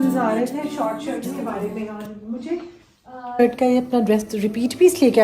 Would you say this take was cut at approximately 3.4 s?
yes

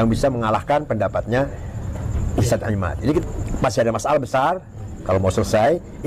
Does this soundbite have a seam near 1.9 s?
no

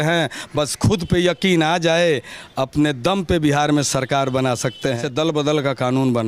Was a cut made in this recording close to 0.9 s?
no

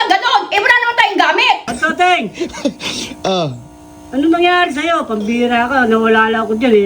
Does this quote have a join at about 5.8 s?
no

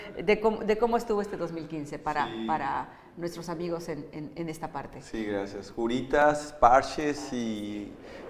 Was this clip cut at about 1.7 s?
yes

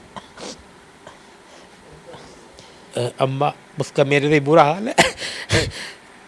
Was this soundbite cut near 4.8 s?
no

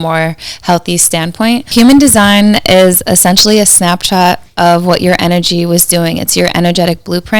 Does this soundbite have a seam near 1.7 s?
yes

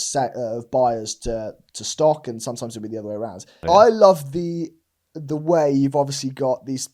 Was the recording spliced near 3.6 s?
yes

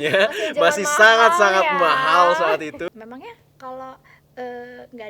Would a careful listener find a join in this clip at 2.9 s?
yes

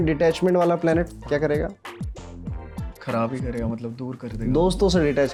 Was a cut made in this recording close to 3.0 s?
no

